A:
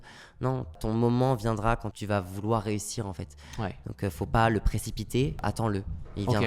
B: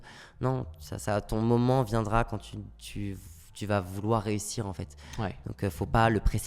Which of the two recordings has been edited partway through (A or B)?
A